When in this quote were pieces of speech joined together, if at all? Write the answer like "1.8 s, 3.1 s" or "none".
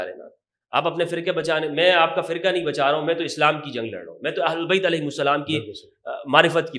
none